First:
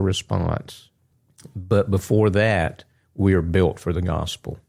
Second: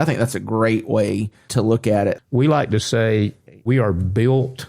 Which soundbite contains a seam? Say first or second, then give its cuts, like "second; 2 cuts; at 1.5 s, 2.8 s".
second; 3 cuts; at 1.4 s, 2.2 s, 3.7 s